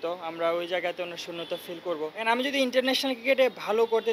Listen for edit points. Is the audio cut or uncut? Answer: cut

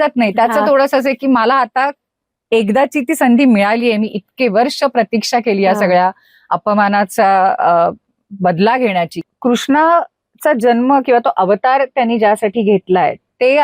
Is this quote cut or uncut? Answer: cut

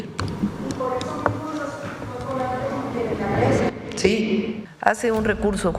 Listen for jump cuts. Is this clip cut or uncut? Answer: cut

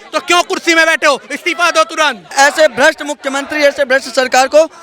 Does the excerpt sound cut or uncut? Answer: cut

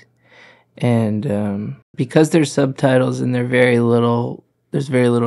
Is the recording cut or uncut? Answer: cut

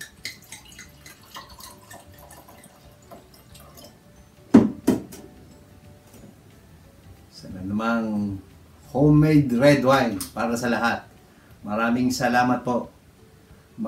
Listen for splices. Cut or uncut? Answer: uncut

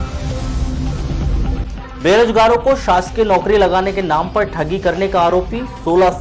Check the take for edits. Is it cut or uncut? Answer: cut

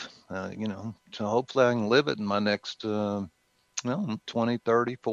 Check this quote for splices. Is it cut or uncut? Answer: uncut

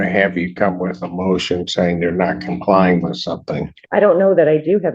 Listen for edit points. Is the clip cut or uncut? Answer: cut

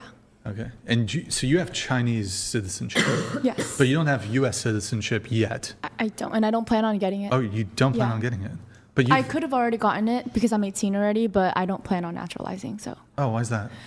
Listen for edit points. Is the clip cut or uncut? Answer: uncut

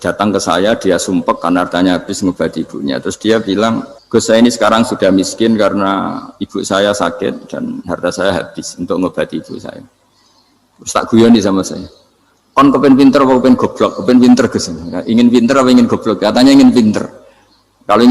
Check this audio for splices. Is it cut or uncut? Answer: cut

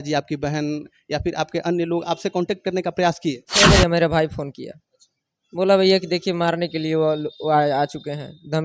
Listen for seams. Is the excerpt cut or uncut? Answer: cut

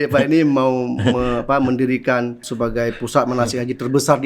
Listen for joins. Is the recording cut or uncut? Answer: cut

